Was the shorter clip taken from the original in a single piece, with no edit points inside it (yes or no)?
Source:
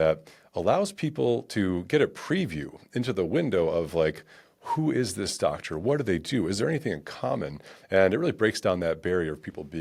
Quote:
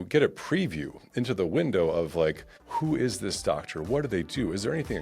no